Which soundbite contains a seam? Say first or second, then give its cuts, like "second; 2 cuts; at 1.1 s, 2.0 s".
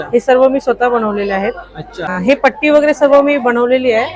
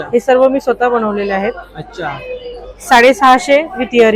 first; 1 cut; at 2.2 s